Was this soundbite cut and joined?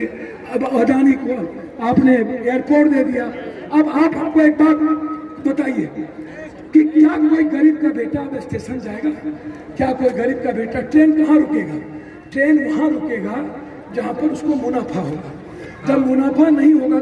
no; 0 cuts

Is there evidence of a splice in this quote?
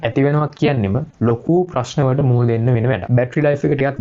yes; 1 cut; at 3.0 s

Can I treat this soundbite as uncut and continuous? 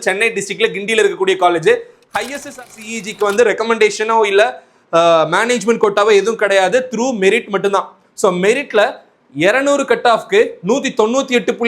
no; 1 cut; at 2.5 s

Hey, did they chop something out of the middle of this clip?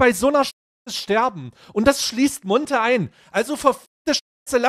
no; 0 cuts

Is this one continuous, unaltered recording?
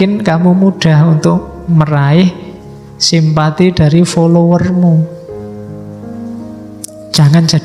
yes; 0 cuts

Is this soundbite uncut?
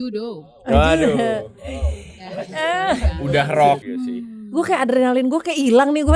no; 1 cut; at 3.8 s

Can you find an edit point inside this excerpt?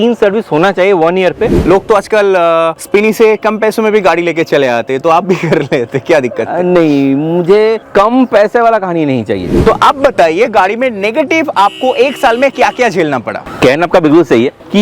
yes; 3 cuts; at 1.5 s, 7.8 s, 9.5 s

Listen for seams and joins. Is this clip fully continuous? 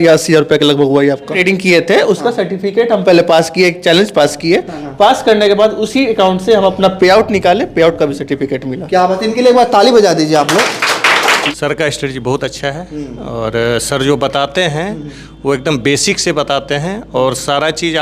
no; 2 cuts; at 1.3 s, 11.4 s

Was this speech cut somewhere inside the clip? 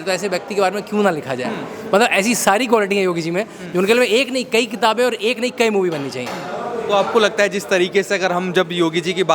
no; 0 cuts

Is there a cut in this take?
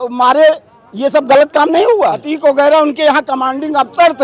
yes; 1 cut; at 2.3 s

